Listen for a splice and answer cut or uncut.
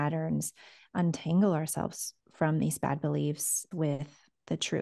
cut